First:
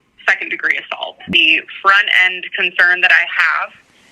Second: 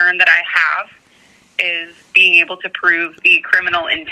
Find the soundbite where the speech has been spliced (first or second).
first